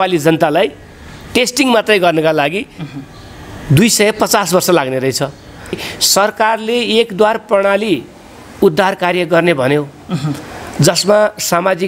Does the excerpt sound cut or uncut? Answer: cut